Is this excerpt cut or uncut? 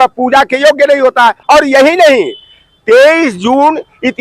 cut